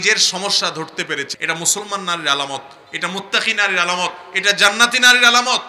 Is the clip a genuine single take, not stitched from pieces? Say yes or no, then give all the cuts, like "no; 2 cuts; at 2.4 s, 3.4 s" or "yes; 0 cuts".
no; 1 cut; at 1.3 s